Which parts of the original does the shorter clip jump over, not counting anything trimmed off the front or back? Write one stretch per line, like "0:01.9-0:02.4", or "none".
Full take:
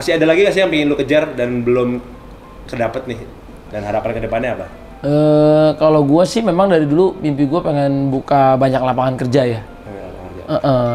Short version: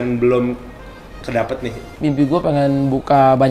0:03.4-0:07.2